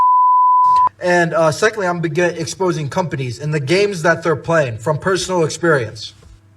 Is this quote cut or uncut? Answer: cut